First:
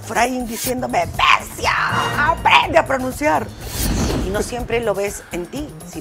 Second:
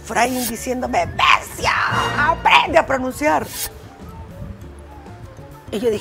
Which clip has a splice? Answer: first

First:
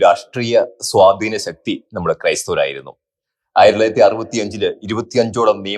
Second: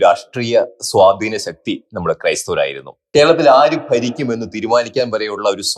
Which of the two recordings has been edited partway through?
second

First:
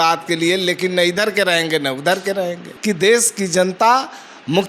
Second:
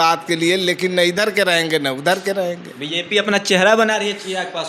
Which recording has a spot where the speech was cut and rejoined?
first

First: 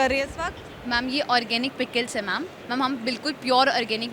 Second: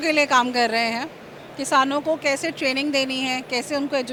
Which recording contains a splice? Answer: first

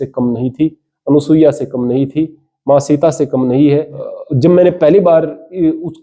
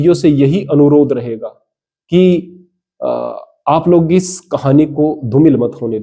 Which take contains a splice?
first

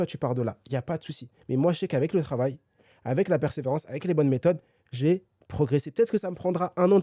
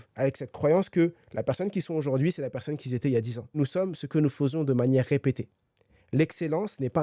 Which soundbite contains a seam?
second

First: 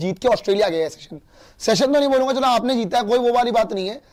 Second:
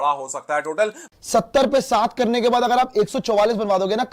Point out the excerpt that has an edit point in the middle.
second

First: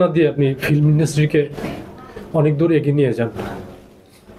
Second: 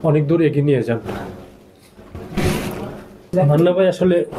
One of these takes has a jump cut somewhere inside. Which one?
second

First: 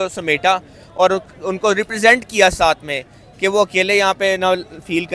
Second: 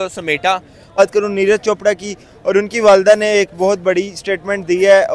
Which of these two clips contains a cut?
second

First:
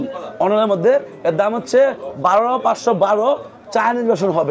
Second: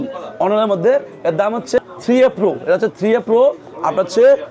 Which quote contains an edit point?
second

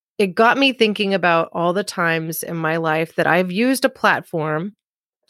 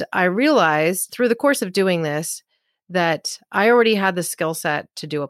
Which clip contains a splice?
second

